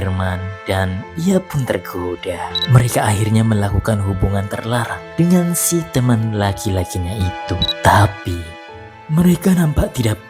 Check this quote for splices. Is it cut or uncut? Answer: uncut